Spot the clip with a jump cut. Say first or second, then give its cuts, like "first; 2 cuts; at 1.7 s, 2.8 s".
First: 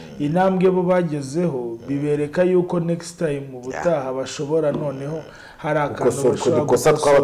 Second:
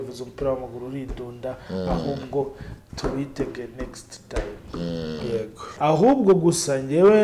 second; 1 cut; at 5.7 s